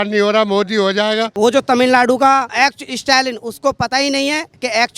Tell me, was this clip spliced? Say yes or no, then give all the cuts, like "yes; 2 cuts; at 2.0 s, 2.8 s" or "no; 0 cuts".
yes; 2 cuts; at 1.3 s, 2.5 s